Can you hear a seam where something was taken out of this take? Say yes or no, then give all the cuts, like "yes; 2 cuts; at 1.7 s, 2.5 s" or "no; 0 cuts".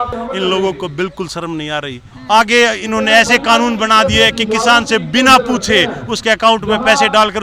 yes; 1 cut; at 2.1 s